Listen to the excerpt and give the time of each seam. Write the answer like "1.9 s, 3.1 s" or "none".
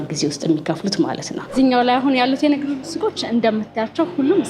1.4 s